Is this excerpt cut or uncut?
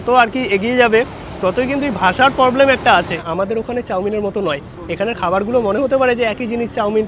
cut